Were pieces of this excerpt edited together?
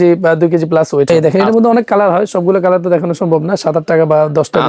yes; 1 cut; at 1.1 s

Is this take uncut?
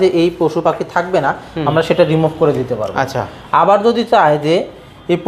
yes; 0 cuts

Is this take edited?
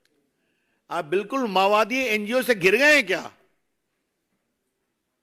no; 0 cuts

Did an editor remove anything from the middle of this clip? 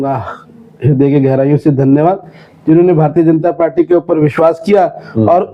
no; 0 cuts

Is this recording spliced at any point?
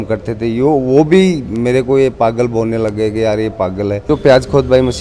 yes; 1 cut; at 4.1 s

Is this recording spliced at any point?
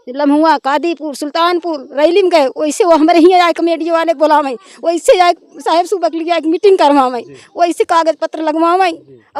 no; 0 cuts

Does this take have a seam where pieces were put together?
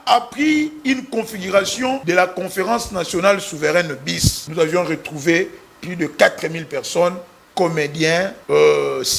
yes; 3 cuts; at 2.0 s, 4.4 s, 8.4 s

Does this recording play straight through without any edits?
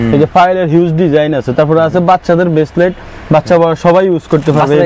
yes; 0 cuts

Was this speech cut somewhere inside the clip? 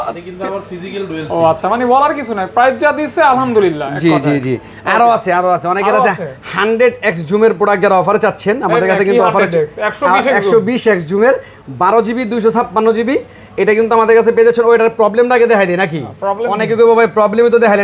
no; 0 cuts

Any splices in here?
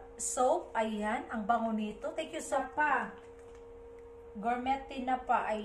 yes; 1 cut; at 2.6 s

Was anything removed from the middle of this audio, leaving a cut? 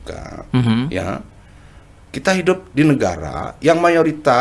no; 0 cuts

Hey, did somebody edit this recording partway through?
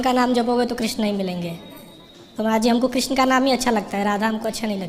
no; 0 cuts

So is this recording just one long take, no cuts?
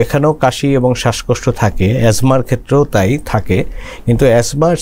yes; 0 cuts

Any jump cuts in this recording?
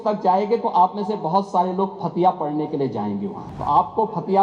yes; 1 cut; at 3.4 s

